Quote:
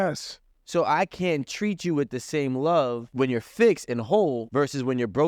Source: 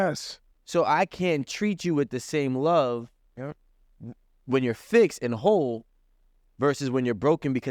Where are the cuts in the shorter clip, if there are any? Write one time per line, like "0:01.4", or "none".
0:03.1
0:04.4